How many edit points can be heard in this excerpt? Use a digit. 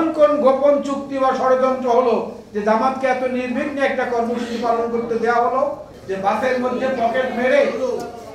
1